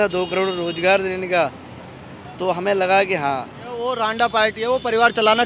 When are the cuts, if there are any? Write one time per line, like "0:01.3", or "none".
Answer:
0:03.9